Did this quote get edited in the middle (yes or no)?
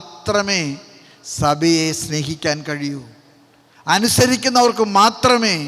no